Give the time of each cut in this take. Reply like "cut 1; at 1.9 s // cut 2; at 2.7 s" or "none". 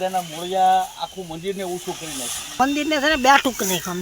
cut 1; at 2.6 s